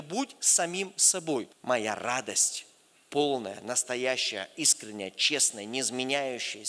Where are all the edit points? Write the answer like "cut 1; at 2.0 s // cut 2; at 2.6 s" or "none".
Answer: cut 1; at 1.5 s